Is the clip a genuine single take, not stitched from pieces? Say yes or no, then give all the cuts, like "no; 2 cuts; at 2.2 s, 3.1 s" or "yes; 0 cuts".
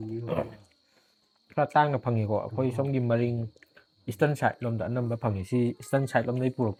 yes; 0 cuts